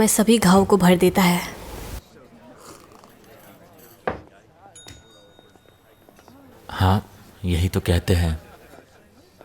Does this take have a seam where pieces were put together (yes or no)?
no